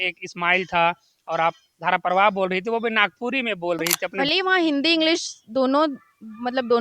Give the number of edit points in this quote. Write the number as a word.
one